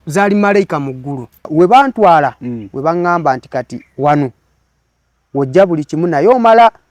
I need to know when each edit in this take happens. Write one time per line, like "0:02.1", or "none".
0:01.5